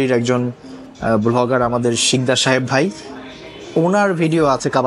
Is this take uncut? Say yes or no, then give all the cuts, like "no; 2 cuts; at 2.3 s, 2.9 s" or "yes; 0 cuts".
yes; 0 cuts